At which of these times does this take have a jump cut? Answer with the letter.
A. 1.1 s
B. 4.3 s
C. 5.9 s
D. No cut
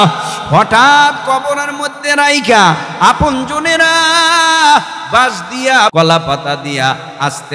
C